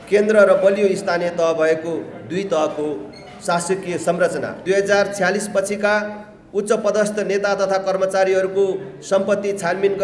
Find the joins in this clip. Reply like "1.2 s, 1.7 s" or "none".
4.6 s